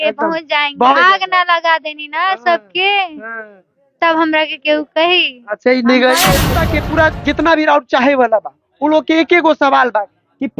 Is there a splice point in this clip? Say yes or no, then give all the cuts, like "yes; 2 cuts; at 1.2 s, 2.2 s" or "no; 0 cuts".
yes; 2 cuts; at 0.9 s, 6.6 s